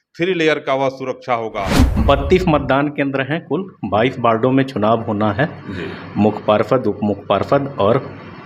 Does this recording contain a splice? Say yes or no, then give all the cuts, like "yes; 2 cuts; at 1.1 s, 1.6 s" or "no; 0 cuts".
yes; 1 cut; at 1.8 s